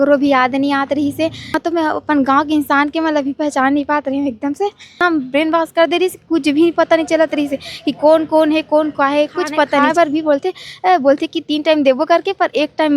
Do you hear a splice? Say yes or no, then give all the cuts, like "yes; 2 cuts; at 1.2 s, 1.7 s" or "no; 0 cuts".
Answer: yes; 3 cuts; at 1.6 s, 5.0 s, 9.9 s